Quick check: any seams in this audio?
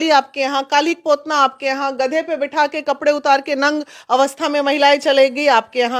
no; 0 cuts

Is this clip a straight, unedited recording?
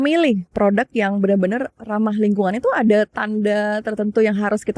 yes; 0 cuts

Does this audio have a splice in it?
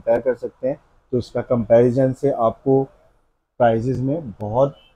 no; 0 cuts

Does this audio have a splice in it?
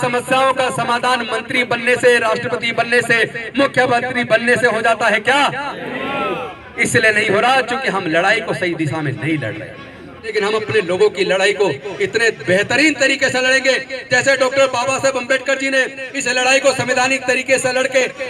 yes; 1 cut; at 10.3 s

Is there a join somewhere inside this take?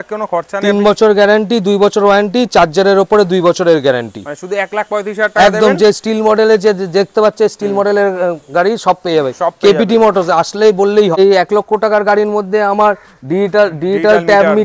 yes; 1 cut; at 11.2 s

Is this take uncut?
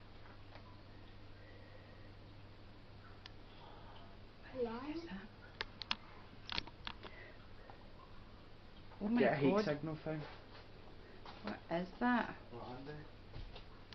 yes; 0 cuts

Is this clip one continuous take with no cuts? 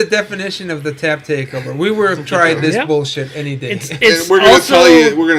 yes; 0 cuts

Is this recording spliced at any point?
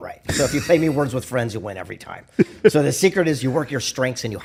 no; 0 cuts

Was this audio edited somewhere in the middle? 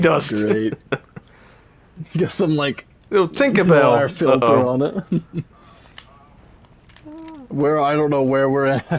no; 0 cuts

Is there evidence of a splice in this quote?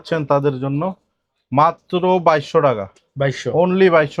no; 0 cuts

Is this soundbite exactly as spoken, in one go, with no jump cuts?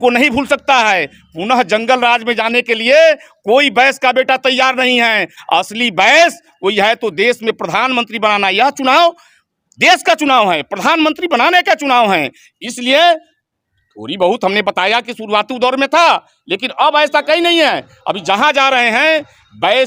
yes; 0 cuts

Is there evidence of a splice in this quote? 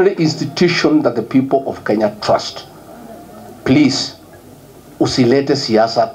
no; 0 cuts

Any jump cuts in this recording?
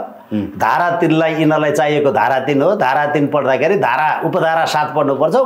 no; 0 cuts

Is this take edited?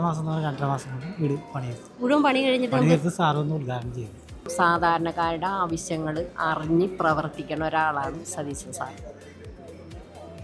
yes; 1 cut; at 4.5 s

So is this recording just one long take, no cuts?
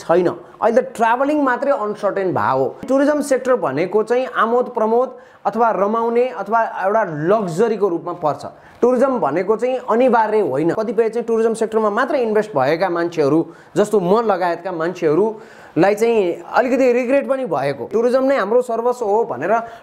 no; 3 cuts; at 2.8 s, 10.8 s, 17.9 s

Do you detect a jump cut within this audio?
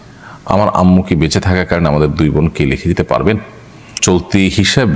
yes; 1 cut; at 4.0 s

